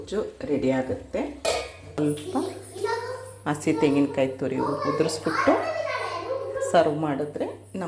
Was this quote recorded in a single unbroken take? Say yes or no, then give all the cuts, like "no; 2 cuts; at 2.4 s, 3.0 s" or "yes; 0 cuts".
no; 1 cut; at 2.0 s